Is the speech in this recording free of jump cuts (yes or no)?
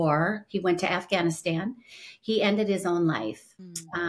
yes